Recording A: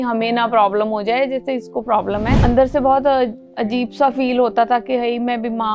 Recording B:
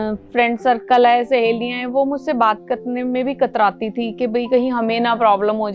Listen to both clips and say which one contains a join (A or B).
A